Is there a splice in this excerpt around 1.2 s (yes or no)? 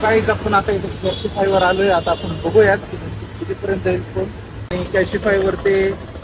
no